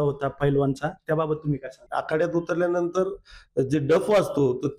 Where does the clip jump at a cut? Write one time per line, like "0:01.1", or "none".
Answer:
0:01.8